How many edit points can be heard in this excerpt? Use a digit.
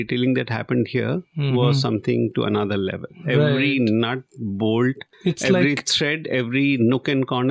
1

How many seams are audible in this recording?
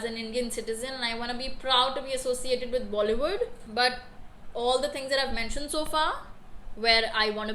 0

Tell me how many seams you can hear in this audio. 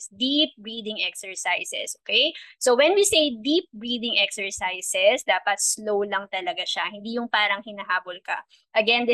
0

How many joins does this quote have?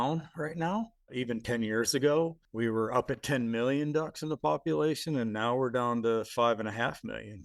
2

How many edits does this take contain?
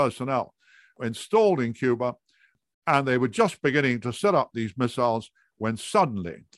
2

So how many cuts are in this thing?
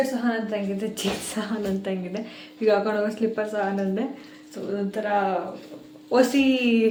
0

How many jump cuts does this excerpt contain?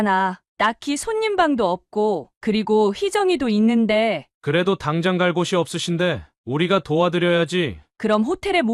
1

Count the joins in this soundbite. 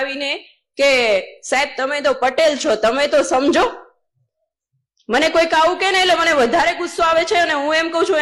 0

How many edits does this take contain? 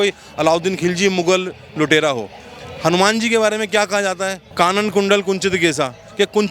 1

